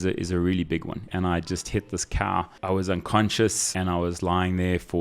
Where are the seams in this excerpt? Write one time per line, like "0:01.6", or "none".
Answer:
0:01.0
0:02.5
0:03.7